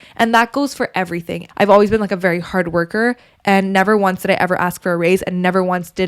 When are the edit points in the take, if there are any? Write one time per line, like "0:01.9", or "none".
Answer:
0:01.4